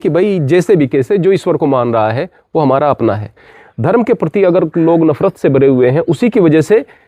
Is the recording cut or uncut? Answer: cut